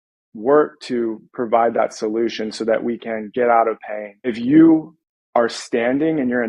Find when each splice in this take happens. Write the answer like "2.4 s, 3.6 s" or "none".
4.4 s